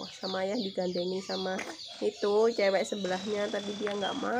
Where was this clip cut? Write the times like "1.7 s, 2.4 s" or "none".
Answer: none